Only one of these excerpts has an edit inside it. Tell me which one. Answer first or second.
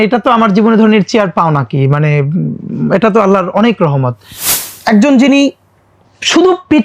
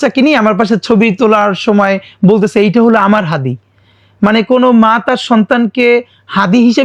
first